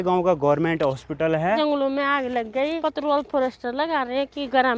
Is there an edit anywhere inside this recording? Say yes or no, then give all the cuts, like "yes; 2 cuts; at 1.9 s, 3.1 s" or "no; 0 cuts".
yes; 2 cuts; at 1.6 s, 2.8 s